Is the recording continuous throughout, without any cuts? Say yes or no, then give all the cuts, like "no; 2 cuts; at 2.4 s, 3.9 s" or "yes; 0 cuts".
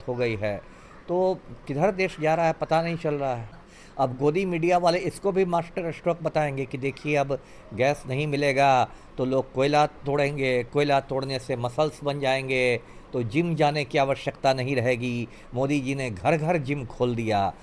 no; 1 cut; at 3.7 s